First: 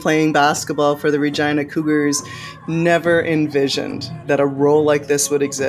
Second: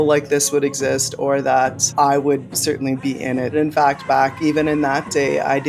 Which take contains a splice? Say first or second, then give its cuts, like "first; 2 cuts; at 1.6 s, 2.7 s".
second; 1 cut; at 3.5 s